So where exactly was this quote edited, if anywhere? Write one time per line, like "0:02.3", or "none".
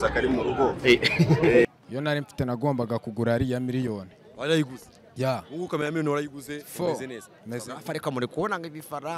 0:01.7